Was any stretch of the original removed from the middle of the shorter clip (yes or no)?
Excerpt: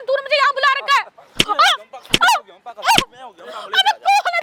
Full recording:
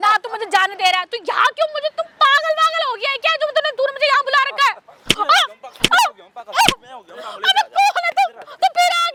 no